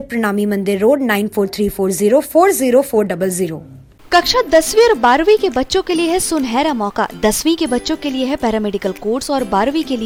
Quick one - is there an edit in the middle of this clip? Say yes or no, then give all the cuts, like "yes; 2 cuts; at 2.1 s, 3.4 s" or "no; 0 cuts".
no; 0 cuts